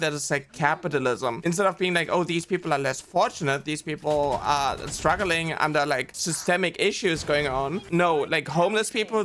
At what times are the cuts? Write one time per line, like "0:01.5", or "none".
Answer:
0:01.4
0:06.2
0:07.8